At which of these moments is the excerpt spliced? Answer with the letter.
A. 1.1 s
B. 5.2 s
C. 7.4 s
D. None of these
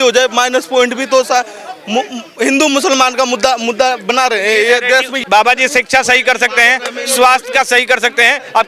B